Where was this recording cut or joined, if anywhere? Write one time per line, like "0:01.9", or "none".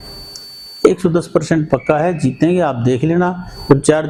none